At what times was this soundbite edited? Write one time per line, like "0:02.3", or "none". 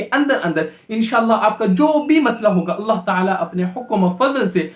none